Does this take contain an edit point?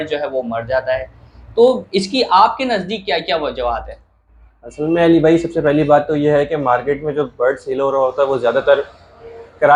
no; 0 cuts

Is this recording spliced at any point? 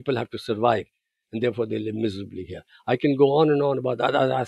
no; 0 cuts

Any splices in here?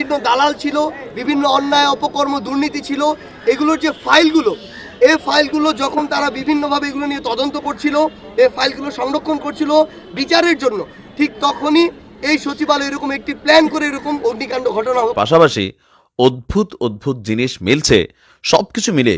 yes; 1 cut; at 15.1 s

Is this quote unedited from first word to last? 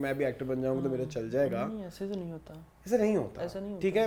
yes; 0 cuts

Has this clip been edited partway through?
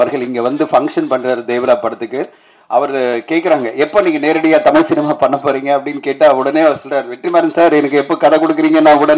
no; 0 cuts

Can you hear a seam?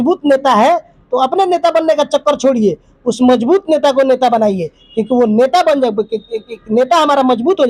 no; 0 cuts

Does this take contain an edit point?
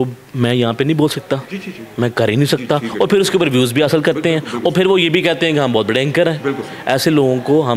no; 0 cuts

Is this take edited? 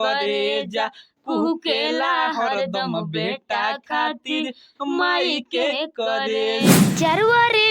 yes; 1 cut; at 6.7 s

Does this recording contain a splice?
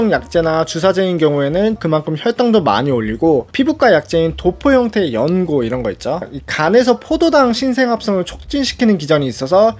yes; 2 cuts; at 1.8 s, 6.3 s

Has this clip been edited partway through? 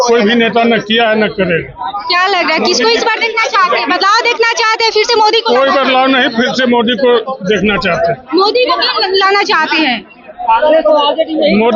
no; 0 cuts

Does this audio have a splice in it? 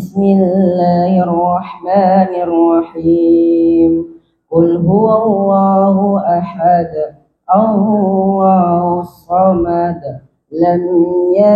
no; 0 cuts

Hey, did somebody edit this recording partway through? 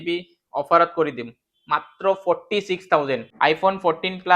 yes; 1 cut; at 3.3 s

